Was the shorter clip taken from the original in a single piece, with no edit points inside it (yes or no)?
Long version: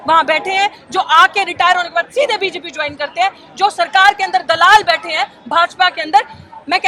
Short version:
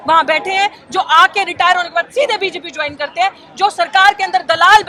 yes